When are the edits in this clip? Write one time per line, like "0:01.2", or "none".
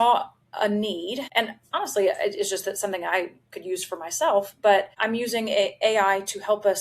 0:01.2
0:05.0